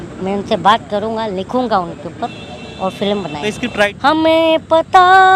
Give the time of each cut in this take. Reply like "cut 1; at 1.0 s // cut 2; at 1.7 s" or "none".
cut 1; at 3.6 s